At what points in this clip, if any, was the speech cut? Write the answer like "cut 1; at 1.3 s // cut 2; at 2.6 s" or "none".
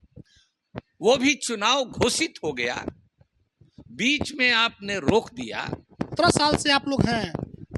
cut 1; at 6.2 s